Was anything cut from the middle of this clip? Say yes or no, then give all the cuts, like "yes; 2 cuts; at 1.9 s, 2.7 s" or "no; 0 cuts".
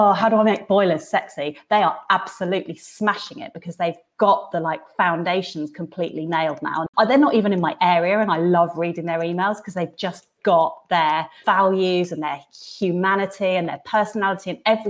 yes; 2 cuts; at 6.9 s, 11.3 s